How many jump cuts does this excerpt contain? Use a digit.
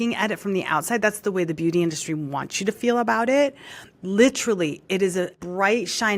0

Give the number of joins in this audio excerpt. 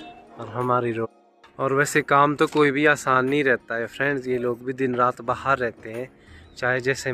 1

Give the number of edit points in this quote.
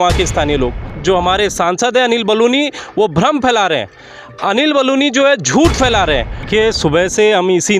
2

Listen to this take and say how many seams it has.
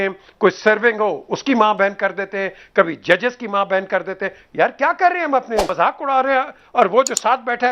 1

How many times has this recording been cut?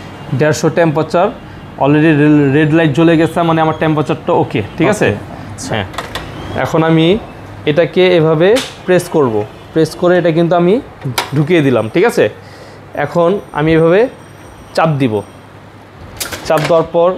0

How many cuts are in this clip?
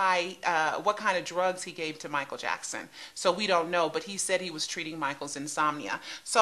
0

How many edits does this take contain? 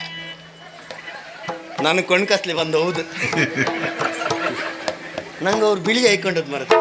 0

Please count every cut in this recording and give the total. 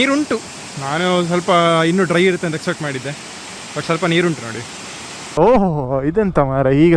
1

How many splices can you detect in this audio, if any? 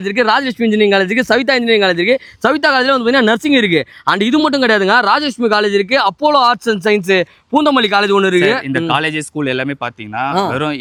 0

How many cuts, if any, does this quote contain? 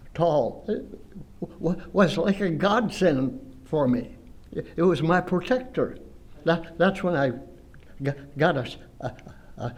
0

